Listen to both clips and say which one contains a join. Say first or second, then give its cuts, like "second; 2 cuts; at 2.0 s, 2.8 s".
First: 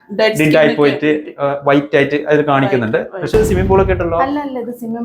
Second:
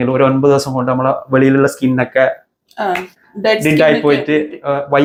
first; 1 cut; at 3.3 s